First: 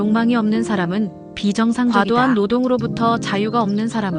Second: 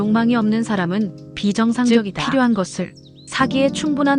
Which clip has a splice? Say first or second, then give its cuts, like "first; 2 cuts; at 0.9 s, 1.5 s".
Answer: first; 1 cut; at 1.9 s